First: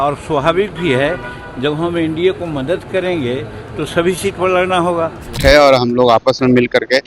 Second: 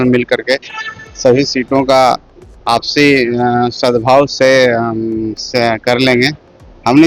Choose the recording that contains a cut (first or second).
first